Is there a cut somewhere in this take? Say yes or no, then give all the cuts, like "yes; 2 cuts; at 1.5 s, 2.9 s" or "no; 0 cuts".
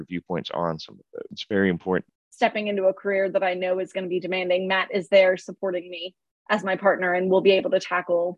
yes; 2 cuts; at 1.4 s, 2.2 s